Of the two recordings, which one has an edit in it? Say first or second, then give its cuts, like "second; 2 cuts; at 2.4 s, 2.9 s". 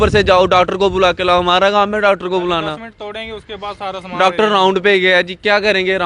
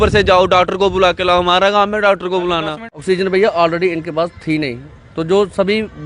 second; 1 cut; at 2.9 s